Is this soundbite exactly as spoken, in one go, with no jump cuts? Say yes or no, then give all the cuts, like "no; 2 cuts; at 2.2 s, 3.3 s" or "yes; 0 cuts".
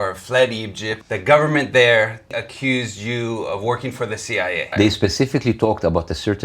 no; 3 cuts; at 0.9 s, 2.3 s, 4.7 s